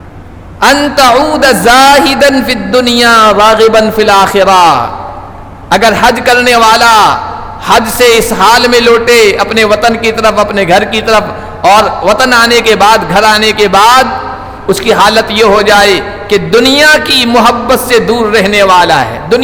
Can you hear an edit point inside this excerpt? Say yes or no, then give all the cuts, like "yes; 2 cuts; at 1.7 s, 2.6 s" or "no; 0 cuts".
no; 0 cuts